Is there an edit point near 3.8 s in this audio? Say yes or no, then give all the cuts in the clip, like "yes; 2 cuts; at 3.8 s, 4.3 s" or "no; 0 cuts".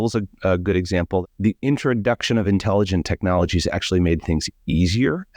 no; 1 cut; at 1.2 s